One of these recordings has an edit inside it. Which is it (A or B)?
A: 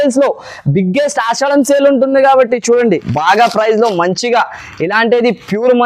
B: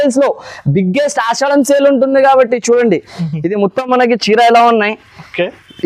A